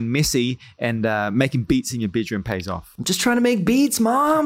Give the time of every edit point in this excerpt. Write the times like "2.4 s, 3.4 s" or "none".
2.8 s